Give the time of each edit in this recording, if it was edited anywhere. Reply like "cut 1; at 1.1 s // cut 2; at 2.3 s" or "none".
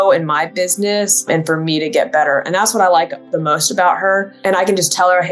cut 1; at 1.3 s // cut 2; at 4.3 s